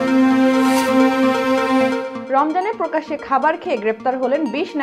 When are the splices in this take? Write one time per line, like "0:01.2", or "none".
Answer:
none